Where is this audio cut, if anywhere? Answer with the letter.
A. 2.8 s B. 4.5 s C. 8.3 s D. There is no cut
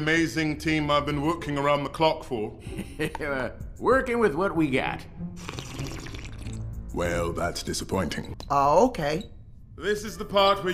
C